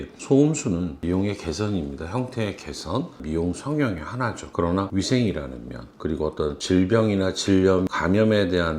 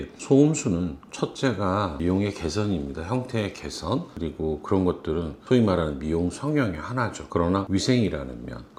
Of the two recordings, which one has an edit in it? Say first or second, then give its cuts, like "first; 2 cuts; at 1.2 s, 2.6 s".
first; 2 cuts; at 1.0 s, 3.2 s